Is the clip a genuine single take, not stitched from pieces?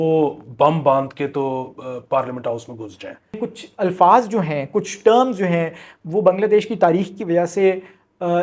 no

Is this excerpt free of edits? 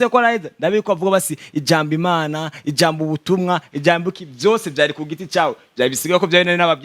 yes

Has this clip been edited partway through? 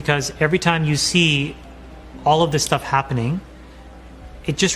no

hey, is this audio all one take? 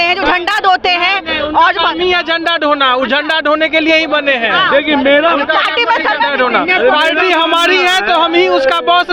yes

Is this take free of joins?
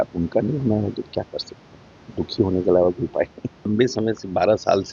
no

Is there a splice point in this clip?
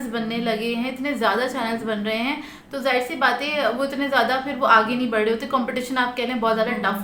no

